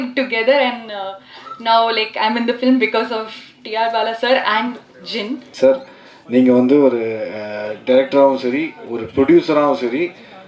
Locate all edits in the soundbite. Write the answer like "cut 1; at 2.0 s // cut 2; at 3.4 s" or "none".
cut 1; at 5.4 s